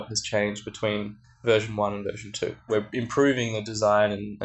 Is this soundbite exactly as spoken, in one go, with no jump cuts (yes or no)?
no